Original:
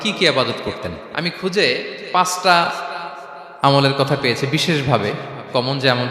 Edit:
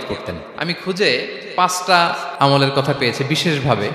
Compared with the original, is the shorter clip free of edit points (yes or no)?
no